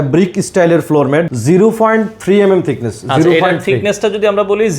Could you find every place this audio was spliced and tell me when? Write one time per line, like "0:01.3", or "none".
0:01.3